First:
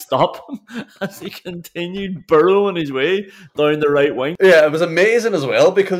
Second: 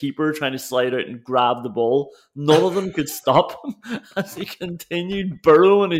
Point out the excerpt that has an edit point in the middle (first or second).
first